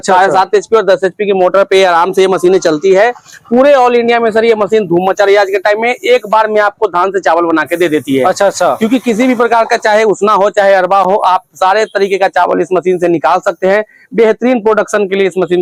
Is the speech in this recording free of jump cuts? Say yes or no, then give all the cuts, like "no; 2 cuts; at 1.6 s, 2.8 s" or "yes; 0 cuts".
yes; 0 cuts